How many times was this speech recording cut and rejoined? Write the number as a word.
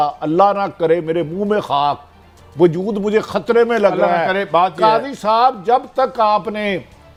zero